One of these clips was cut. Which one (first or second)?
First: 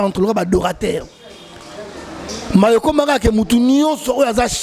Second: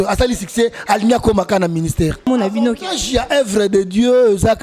second